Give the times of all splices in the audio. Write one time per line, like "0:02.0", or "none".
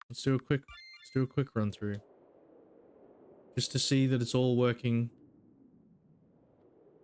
none